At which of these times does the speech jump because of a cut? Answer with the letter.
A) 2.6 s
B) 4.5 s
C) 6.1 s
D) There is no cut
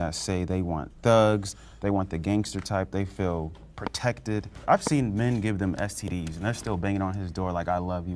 B